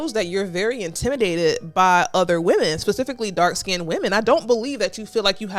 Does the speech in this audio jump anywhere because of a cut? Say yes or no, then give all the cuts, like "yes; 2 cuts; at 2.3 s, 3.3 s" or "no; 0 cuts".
no; 0 cuts